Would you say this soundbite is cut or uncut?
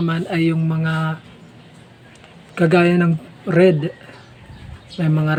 uncut